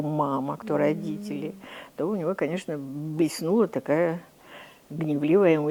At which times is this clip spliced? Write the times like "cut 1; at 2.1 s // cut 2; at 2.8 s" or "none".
none